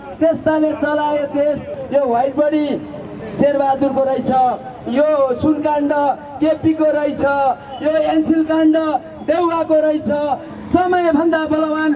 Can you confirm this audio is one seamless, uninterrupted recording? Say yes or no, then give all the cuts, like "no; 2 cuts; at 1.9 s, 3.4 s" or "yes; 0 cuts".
no; 2 cuts; at 1.7 s, 10.5 s